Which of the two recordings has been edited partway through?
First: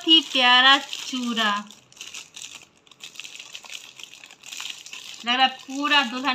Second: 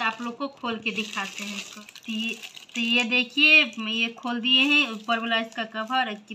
second; 1 cut; at 1.7 s

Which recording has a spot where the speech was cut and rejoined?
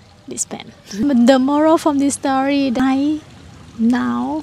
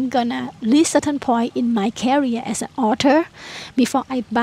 first; 2 cuts; at 1.0 s, 2.8 s

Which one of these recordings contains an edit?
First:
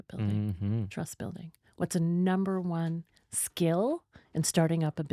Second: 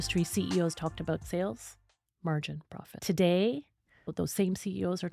second; 3 cuts; at 1.2 s, 2.8 s, 4.1 s

